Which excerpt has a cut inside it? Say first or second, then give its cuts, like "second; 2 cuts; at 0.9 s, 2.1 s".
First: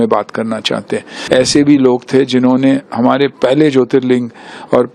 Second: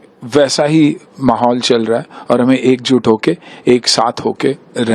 first; 1 cut; at 1.1 s